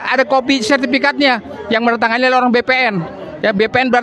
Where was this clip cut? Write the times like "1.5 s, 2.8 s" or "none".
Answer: none